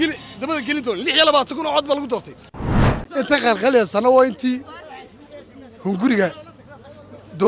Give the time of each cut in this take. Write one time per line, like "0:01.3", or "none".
0:02.7